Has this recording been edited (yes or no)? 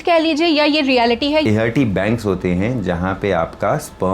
yes